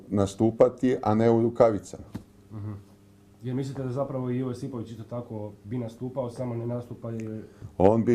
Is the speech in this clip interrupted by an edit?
yes; 1 cut; at 2.6 s

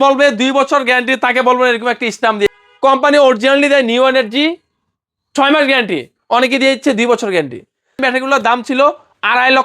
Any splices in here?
yes; 2 cuts; at 2.5 s, 8.0 s

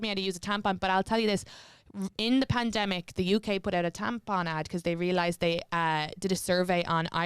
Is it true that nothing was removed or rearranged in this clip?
yes; 0 cuts

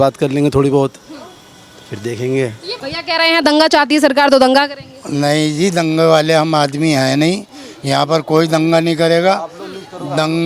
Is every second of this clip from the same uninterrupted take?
no; 1 cut; at 2.8 s

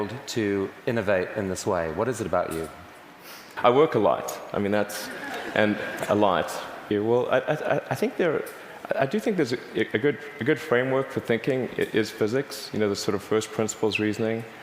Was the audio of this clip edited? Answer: yes; 2 cuts; at 3.5 s, 6.8 s

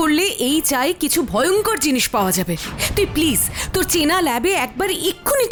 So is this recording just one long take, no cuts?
yes; 0 cuts

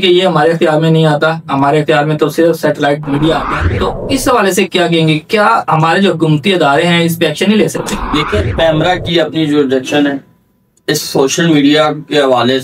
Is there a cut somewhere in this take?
yes; 1 cut; at 3.4 s

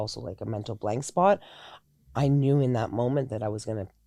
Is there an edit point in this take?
no; 0 cuts

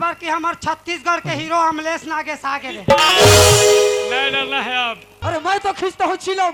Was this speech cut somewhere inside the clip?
yes; 1 cut; at 5.1 s

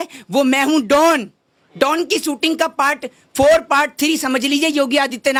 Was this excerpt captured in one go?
yes; 0 cuts

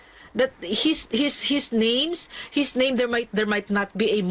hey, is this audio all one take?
yes; 0 cuts

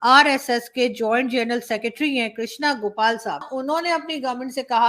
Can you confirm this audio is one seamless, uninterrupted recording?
no; 1 cut; at 3.5 s

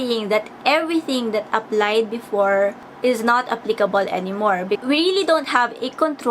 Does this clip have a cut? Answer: yes; 2 cuts; at 2.9 s, 4.8 s

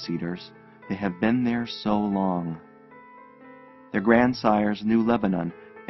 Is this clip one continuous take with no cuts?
yes; 0 cuts

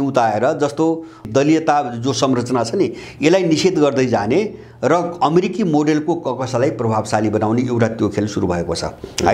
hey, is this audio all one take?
no; 1 cut; at 1.2 s

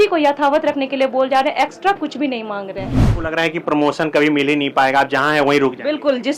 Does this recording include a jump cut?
yes; 1 cut; at 3.0 s

